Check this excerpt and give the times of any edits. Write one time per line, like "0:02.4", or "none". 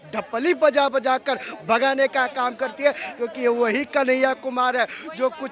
none